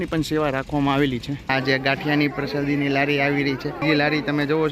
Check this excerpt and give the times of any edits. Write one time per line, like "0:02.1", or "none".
0:01.3
0:03.8